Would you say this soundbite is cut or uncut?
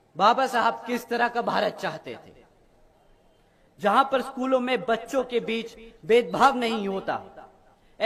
uncut